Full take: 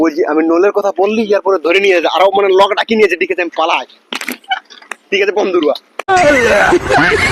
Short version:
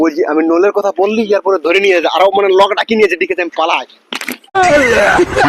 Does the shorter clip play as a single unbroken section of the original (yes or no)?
no